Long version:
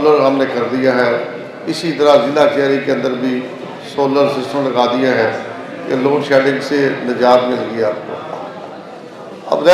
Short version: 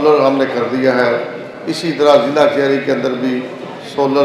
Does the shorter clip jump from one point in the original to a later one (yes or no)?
no